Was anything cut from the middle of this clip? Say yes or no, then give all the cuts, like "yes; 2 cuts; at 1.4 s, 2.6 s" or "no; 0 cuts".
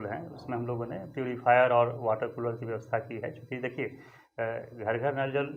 no; 0 cuts